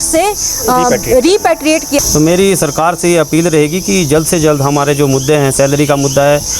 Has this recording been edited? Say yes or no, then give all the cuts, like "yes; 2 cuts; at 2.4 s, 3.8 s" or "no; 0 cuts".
yes; 1 cut; at 1.9 s